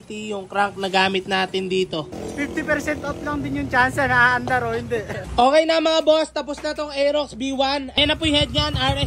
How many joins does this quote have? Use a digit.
3